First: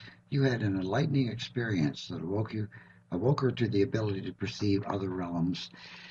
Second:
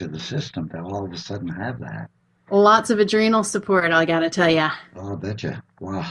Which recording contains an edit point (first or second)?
second